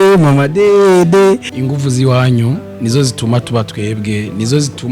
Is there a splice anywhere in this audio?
yes; 1 cut; at 1.5 s

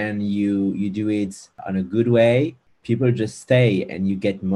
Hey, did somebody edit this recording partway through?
yes; 2 cuts; at 1.6 s, 2.7 s

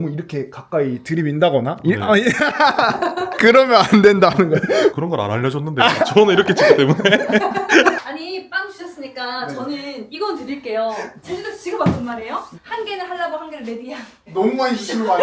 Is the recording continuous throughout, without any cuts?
yes; 0 cuts

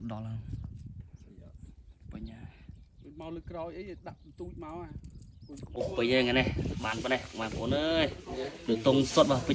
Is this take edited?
yes; 1 cut; at 5.7 s

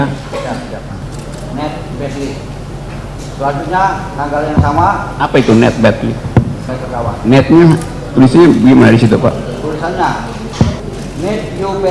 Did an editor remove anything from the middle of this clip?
yes; 3 cuts; at 1.0 s, 6.7 s, 10.8 s

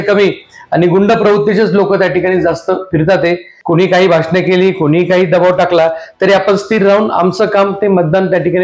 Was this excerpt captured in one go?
no; 1 cut; at 3.5 s

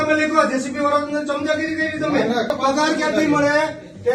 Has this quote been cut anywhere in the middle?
yes; 1 cut; at 2.5 s

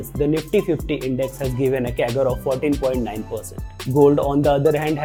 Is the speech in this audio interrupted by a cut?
no; 0 cuts

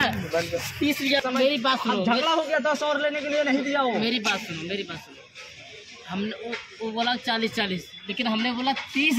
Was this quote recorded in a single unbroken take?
yes; 0 cuts

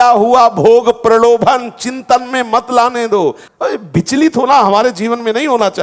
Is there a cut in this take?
yes; 1 cut; at 3.4 s

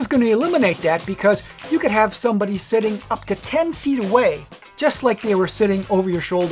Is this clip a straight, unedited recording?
no; 1 cut; at 4.6 s

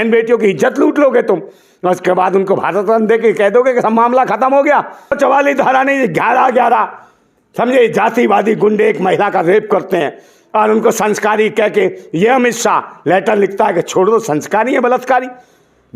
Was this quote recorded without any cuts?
no; 1 cut; at 5.2 s

